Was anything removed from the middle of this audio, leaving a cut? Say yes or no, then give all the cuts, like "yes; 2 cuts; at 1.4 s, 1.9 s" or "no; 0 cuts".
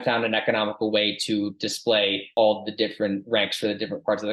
yes; 1 cut; at 2.3 s